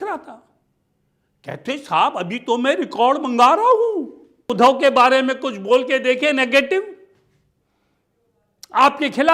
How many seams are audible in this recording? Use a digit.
1